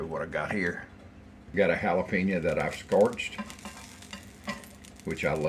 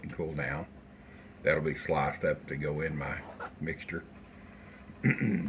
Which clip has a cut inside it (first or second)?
first